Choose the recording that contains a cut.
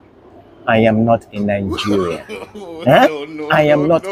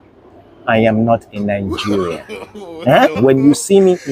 second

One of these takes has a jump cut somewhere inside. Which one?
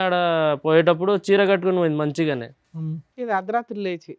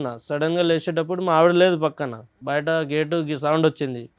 second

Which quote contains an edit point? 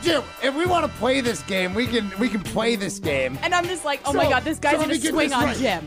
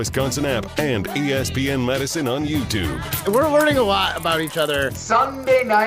second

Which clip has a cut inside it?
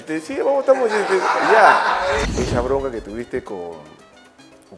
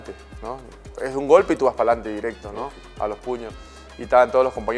first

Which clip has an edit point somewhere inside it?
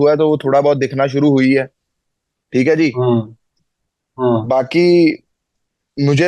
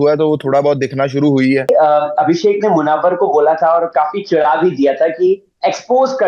second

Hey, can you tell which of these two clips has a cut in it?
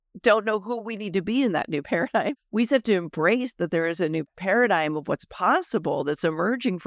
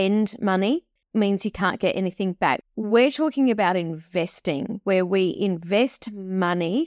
second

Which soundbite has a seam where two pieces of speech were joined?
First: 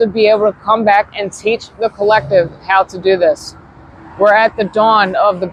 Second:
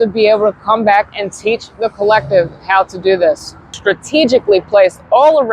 second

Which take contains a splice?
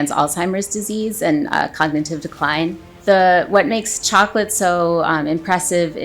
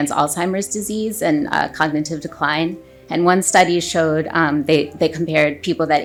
first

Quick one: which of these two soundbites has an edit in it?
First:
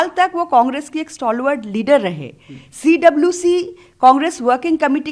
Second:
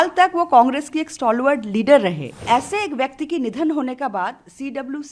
second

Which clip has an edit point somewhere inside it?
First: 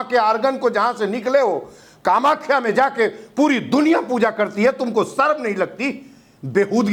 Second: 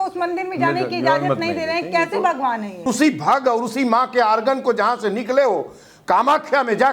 second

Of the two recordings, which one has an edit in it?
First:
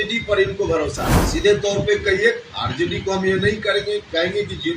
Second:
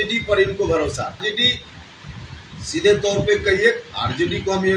first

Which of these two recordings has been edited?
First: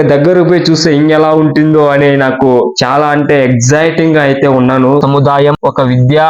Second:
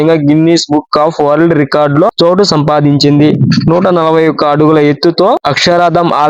first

